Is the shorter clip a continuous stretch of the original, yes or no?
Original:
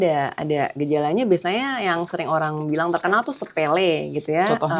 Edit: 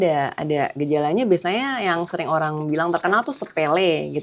yes